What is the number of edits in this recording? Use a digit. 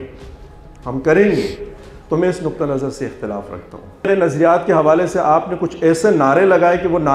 1